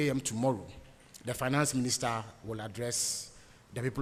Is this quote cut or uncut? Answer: uncut